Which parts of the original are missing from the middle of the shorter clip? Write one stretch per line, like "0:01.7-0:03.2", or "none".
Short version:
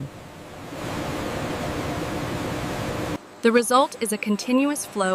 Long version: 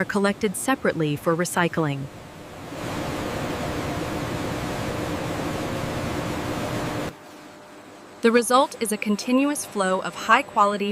0:05.2-0:08.0

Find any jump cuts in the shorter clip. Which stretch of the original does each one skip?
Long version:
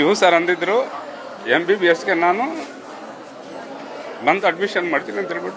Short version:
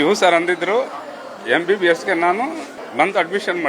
0:02.8-0:04.0

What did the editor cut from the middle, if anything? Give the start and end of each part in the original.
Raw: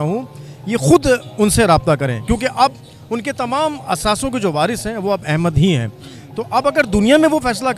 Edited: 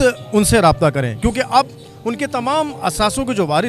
none

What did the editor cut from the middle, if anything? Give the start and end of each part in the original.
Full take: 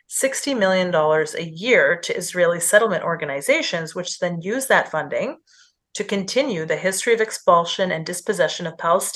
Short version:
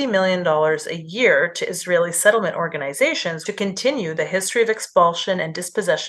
0:03.9-0:05.9

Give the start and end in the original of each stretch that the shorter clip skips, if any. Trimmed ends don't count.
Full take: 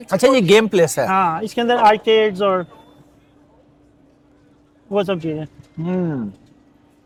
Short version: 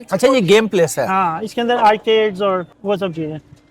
0:02.7-0:04.8

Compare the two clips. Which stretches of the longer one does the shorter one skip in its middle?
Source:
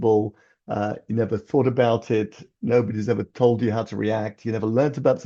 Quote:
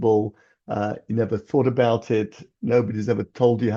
none

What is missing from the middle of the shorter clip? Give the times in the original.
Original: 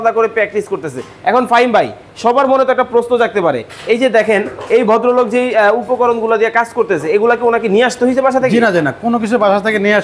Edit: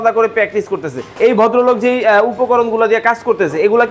0:01.1-0:04.6

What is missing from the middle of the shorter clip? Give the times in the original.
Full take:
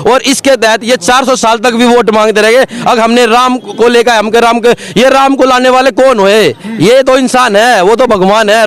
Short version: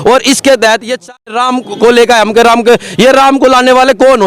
0:01.3-0:03.3

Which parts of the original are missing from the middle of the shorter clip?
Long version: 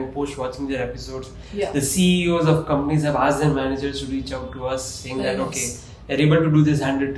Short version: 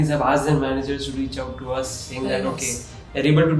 none

